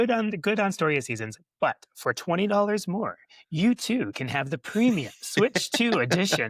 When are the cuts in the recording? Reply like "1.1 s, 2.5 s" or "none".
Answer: none